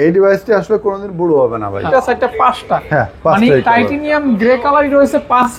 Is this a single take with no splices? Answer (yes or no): no